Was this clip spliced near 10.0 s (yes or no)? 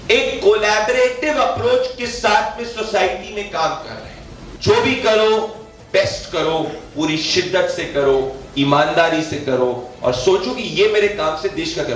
no